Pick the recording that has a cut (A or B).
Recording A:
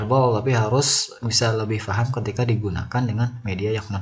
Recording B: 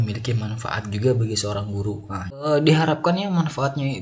B